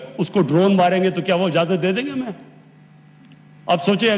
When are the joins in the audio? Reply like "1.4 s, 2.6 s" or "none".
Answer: none

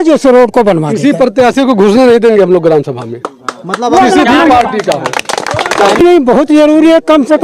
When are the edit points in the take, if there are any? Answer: 6.0 s

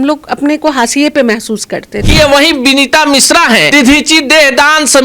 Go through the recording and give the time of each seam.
2.0 s, 3.7 s

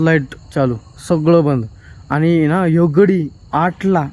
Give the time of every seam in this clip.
none

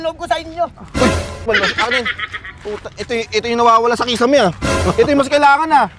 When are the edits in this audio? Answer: 1.5 s

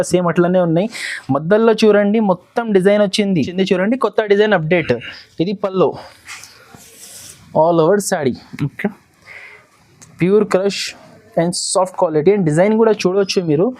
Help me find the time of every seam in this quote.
3.5 s

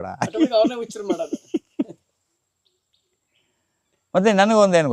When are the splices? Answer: none

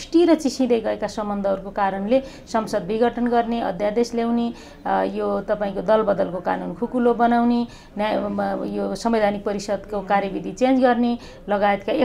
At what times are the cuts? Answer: none

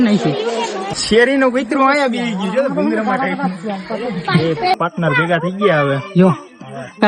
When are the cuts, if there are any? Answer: 0.9 s, 4.8 s

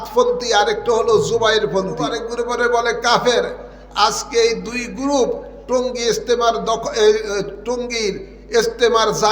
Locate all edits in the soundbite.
2.2 s

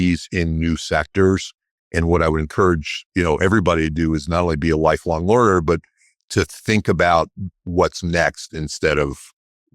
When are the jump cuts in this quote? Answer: none

